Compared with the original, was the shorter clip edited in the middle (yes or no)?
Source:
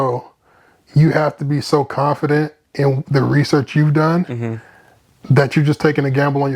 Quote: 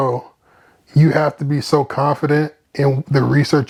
no